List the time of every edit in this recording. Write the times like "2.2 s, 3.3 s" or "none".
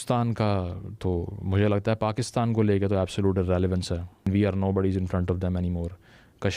4.3 s